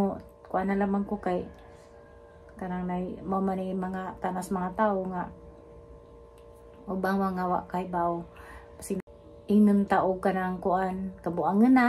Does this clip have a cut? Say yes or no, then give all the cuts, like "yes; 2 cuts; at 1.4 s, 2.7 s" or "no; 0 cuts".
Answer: yes; 1 cut; at 9.0 s